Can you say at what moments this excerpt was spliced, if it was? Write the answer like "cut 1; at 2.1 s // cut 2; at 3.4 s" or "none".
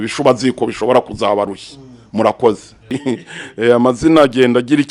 cut 1; at 2.7 s